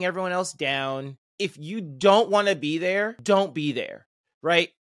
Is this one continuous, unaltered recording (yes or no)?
no